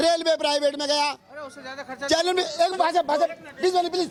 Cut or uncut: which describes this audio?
uncut